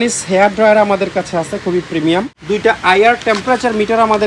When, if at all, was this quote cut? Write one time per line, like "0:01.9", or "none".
0:02.4